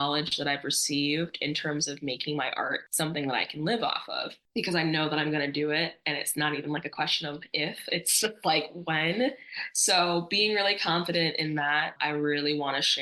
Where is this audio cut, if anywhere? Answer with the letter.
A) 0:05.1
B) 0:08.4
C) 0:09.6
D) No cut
D